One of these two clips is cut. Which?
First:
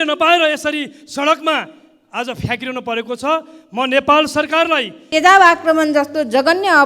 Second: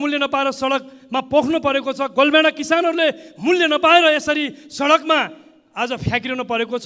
first; 1 cut; at 5.0 s

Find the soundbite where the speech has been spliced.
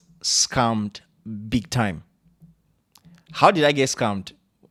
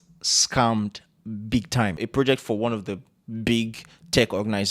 second; 1 cut; at 2.0 s

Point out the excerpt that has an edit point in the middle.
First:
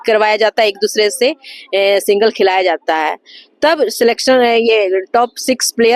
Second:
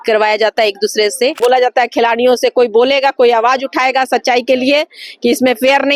second; 1 cut; at 1.4 s

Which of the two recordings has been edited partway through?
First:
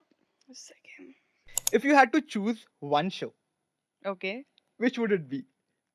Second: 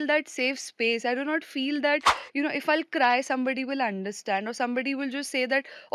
first; 1 cut; at 1.6 s

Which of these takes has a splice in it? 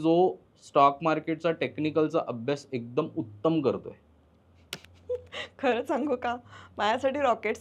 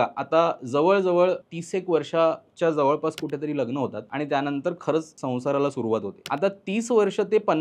second; 4 cuts; at 1.5 s, 4.0 s, 5.2 s, 6.2 s

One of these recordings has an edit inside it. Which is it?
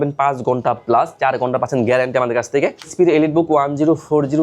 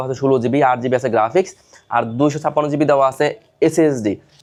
first; 1 cut; at 2.9 s

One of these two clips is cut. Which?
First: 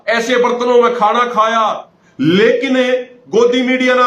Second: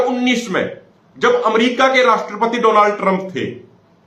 first; 1 cut; at 1.9 s

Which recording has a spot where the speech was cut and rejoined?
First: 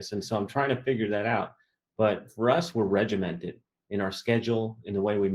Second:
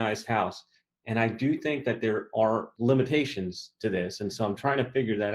second; 1 cut; at 2.7 s

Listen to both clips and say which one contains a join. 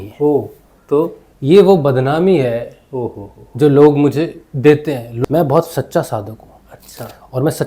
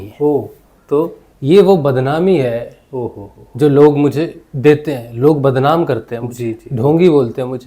first; 1 cut; at 5.1 s

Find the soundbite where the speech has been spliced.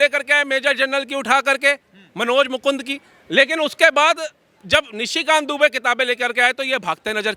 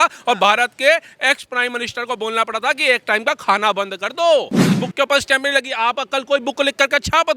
second; 1 cut; at 4.8 s

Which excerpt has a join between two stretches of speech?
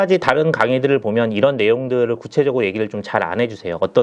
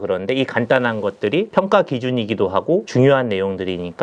second; 2 cuts; at 1.5 s, 2.9 s

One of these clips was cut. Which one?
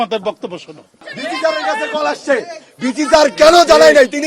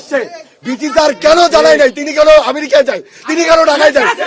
first; 1 cut; at 1.1 s

